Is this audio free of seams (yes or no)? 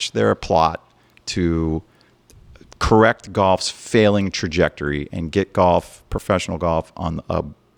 yes